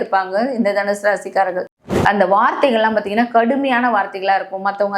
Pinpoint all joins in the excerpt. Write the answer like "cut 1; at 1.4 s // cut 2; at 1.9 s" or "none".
cut 1; at 1.9 s